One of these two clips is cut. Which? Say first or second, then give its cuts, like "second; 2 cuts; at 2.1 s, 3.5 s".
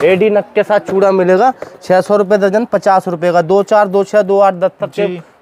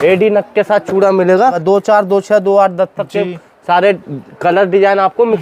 second; 1 cut; at 1.6 s